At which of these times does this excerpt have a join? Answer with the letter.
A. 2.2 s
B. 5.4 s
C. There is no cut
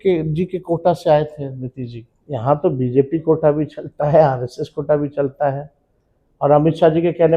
A